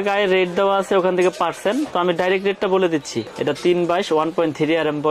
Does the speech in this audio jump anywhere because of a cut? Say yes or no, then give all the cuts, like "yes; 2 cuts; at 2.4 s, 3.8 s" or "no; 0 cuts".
yes; 1 cut; at 3.3 s